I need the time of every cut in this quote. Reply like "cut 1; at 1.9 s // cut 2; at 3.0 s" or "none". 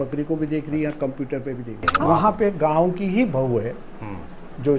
cut 1; at 1.9 s